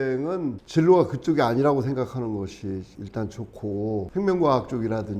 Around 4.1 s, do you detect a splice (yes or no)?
yes